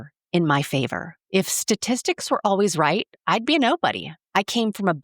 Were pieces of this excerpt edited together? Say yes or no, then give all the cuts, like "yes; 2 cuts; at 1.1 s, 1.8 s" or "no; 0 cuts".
yes; 2 cuts; at 1.1 s, 4.1 s